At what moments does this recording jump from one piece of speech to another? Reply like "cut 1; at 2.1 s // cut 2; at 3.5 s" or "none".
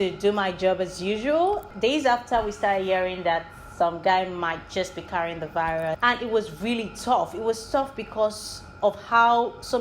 cut 1; at 1.7 s // cut 2; at 6.0 s